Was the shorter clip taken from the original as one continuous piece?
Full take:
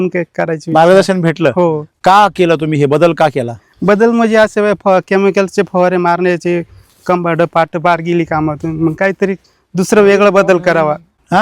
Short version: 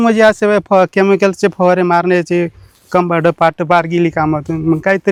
yes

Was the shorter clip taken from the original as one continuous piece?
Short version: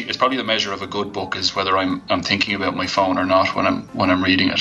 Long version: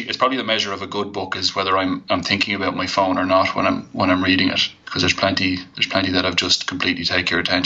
yes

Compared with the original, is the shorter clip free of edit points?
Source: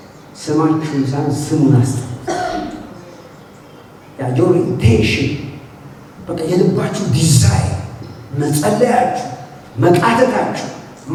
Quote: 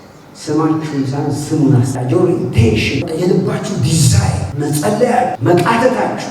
no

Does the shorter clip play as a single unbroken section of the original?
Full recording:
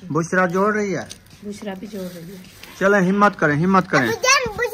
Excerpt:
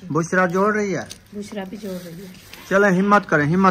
no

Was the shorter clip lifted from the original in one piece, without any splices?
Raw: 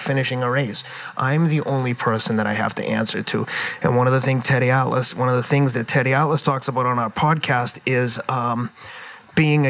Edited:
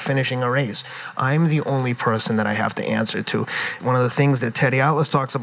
no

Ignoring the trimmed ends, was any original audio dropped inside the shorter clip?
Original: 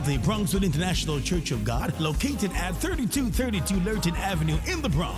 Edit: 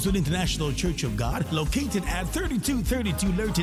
no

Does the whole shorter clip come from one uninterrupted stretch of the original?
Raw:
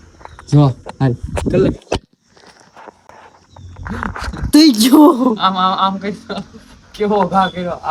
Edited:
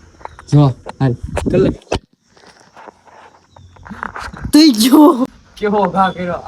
no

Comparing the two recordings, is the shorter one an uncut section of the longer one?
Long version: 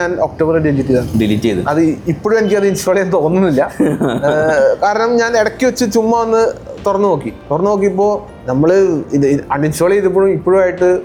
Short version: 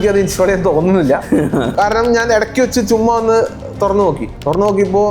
no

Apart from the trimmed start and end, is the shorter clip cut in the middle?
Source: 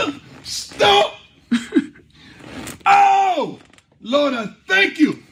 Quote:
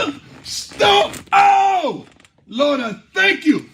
yes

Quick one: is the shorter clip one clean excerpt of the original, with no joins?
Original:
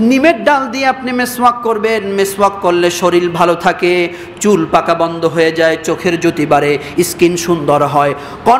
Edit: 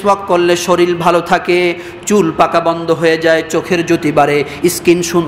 yes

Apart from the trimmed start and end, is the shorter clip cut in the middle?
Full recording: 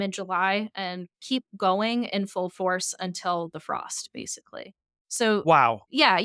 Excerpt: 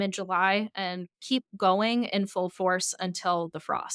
no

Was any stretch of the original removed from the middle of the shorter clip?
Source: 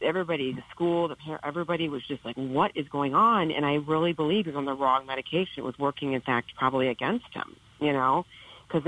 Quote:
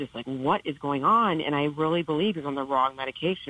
no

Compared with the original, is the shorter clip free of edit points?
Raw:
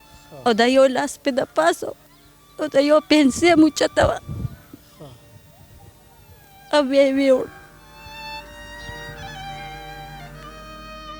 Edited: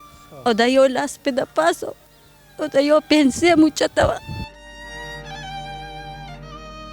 no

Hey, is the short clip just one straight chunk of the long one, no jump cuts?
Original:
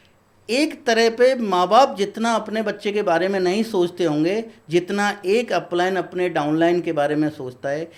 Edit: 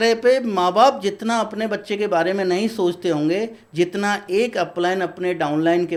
yes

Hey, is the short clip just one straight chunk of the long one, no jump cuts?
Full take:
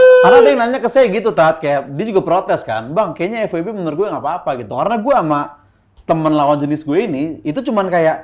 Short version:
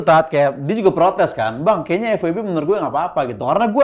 yes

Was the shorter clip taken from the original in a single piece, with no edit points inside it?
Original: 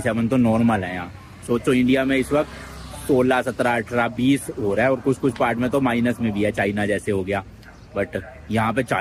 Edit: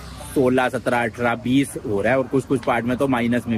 yes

